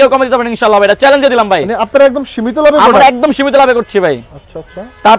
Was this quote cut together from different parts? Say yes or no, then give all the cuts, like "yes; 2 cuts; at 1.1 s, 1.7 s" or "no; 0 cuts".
no; 0 cuts